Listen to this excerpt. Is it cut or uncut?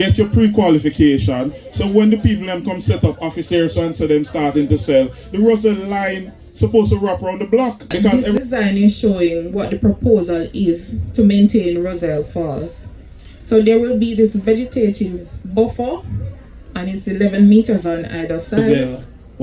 cut